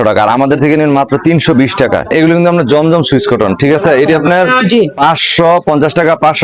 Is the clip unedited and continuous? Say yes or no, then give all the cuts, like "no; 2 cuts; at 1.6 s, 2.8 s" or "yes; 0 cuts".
no; 1 cut; at 2.1 s